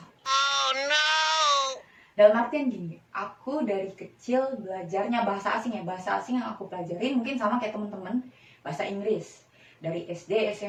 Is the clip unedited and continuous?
yes; 0 cuts

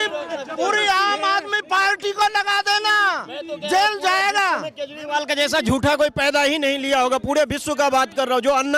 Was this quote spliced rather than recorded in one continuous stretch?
no; 0 cuts

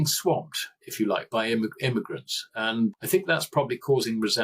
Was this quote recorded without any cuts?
no; 1 cut; at 2.9 s

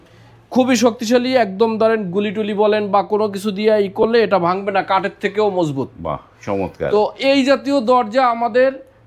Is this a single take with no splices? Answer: yes; 0 cuts

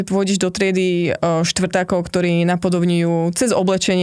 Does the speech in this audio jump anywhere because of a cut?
no; 0 cuts

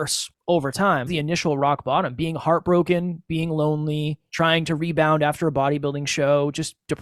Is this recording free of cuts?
no; 1 cut; at 1.1 s

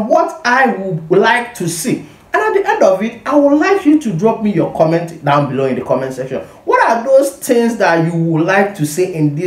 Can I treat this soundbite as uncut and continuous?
yes; 0 cuts

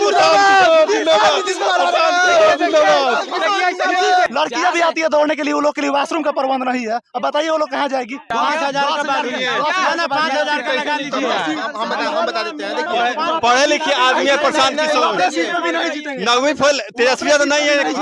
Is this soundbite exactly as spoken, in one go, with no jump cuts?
no; 2 cuts; at 4.3 s, 8.3 s

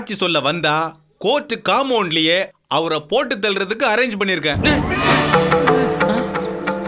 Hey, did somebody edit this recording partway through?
no; 0 cuts

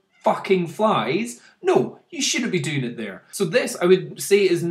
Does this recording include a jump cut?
yes; 1 cut; at 3.2 s

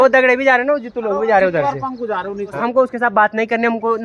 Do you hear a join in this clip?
yes; 1 cut; at 2.6 s

